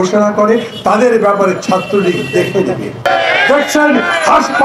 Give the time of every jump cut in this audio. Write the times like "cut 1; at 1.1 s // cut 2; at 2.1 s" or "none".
cut 1; at 3.4 s